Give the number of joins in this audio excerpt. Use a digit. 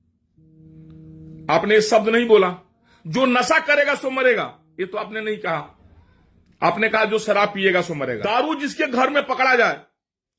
1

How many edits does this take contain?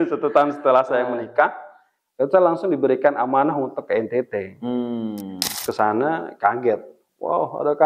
1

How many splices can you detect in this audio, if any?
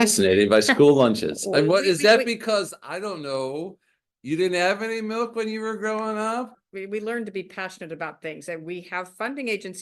1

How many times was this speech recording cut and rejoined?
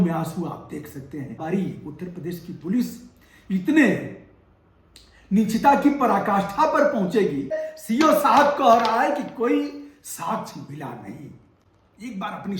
2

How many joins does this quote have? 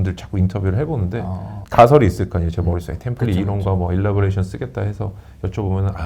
0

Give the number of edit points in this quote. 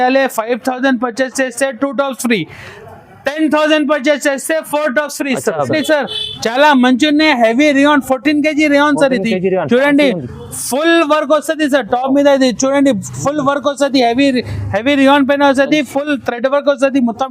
1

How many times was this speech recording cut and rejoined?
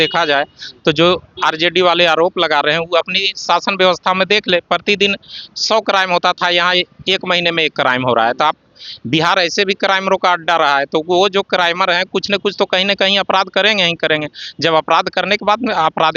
0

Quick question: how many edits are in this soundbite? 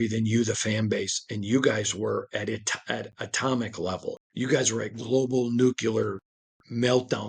1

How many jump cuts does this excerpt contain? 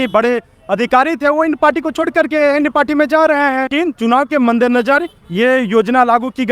1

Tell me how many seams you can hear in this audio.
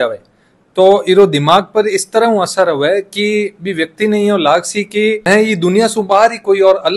0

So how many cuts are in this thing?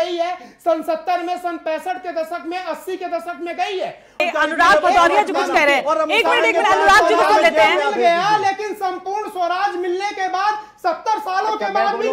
1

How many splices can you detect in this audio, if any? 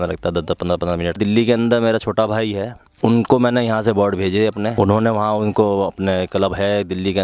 3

